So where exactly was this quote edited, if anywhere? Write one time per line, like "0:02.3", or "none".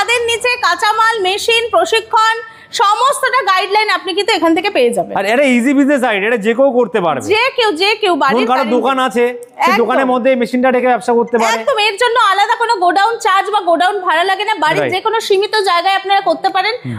none